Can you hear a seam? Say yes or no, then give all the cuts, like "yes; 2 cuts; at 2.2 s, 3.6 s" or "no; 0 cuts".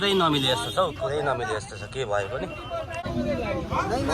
yes; 1 cut; at 3.0 s